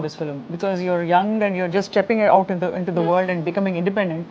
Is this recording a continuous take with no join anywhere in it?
yes; 0 cuts

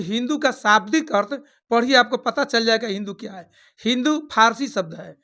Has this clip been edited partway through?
no; 0 cuts

